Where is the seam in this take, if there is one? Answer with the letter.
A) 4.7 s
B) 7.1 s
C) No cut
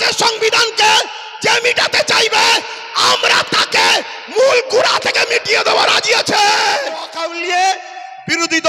B